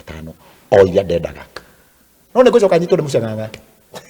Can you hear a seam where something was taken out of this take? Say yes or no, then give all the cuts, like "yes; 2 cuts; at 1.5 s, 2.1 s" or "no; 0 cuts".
yes; 1 cut; at 2.1 s